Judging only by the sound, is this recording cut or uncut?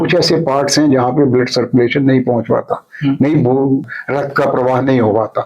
cut